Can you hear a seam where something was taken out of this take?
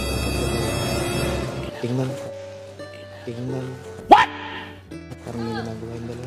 no; 0 cuts

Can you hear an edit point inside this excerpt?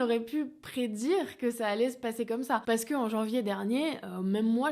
yes; 1 cut; at 2.6 s

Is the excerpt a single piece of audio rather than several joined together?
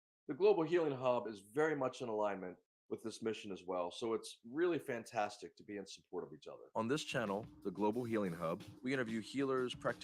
no; 1 cut; at 6.6 s

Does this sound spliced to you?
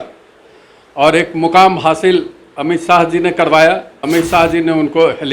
yes; 1 cut; at 3.9 s

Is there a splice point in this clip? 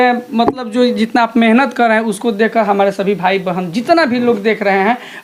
no; 0 cuts

